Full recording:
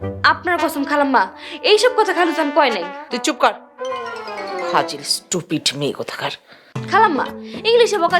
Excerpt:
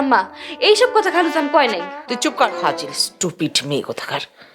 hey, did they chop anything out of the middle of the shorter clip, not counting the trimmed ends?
yes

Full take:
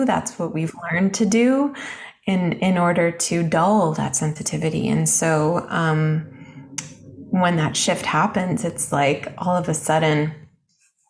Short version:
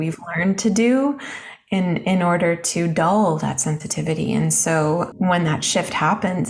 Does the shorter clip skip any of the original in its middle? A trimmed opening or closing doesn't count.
yes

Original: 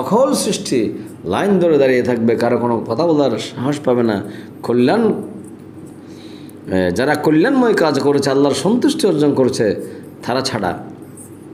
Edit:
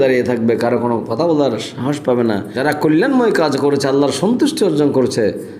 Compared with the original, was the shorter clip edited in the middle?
yes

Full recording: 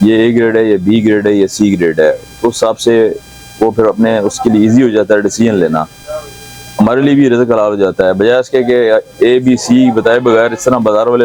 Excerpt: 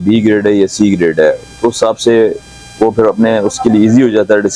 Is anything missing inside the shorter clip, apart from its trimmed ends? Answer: no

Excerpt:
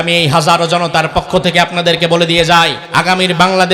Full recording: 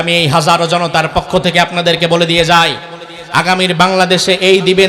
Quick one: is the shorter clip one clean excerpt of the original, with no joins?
no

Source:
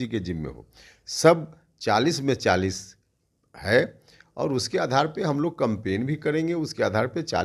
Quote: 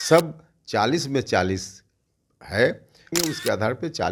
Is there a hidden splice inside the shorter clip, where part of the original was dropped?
yes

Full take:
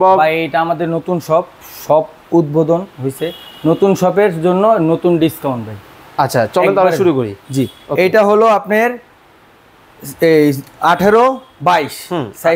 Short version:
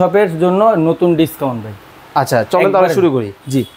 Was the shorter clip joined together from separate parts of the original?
no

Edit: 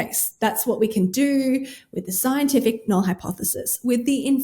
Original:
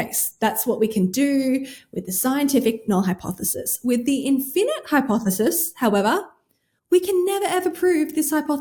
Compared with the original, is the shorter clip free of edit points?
yes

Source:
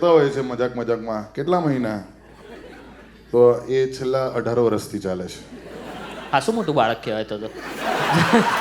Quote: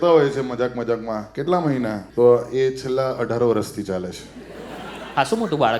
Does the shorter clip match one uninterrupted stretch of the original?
no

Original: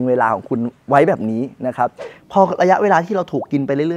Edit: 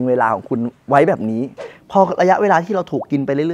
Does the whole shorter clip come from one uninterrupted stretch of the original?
no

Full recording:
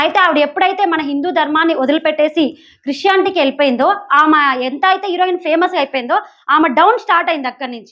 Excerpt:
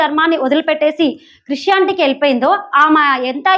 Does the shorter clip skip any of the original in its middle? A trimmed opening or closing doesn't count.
no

